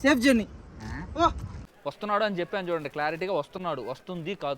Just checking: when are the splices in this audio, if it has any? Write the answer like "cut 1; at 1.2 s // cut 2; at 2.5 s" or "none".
cut 1; at 1.7 s

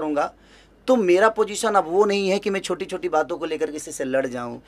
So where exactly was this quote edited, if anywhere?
none

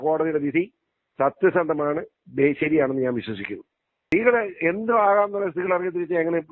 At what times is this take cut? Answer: cut 1; at 4.0 s

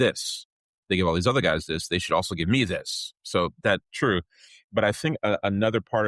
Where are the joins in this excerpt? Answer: none

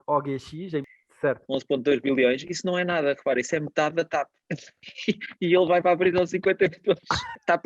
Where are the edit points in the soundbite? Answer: cut 1; at 0.9 s

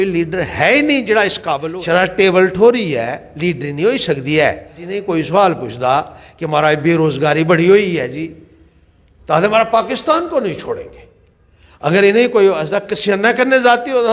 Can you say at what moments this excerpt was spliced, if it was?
cut 1; at 1.6 s // cut 2; at 4.9 s

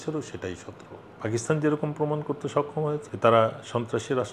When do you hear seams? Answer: cut 1; at 1.0 s // cut 2; at 3.1 s

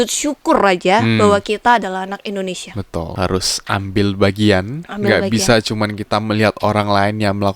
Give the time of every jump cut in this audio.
cut 1; at 3.1 s

